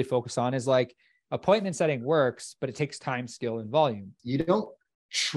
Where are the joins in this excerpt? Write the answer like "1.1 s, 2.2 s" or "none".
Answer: 4.2 s